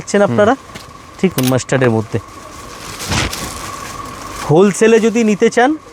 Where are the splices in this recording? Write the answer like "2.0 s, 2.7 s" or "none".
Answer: 1.3 s

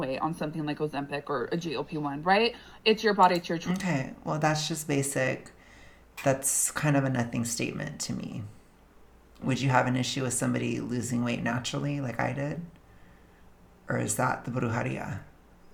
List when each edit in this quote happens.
none

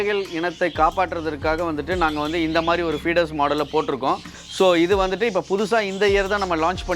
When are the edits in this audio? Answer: 4.2 s

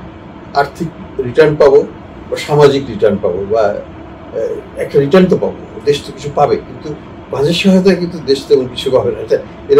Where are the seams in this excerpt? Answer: none

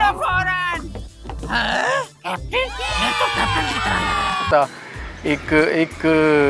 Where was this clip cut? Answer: none

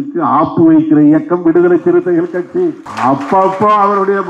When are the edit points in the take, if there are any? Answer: 2.9 s

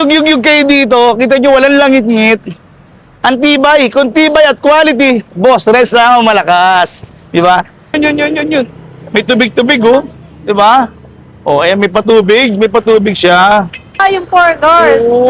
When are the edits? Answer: 7.9 s, 14.0 s

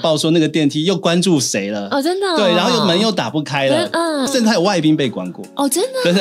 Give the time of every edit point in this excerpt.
4.3 s

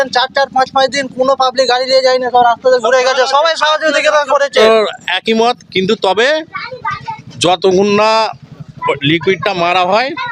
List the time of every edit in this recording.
4.6 s

